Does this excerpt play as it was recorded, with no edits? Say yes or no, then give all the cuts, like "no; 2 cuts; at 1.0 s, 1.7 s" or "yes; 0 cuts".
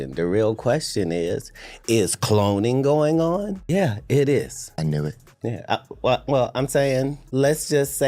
no; 3 cuts; at 3.6 s, 4.6 s, 7.2 s